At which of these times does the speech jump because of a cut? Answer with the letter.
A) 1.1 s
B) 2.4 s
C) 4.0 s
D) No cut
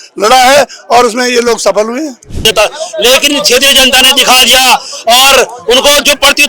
B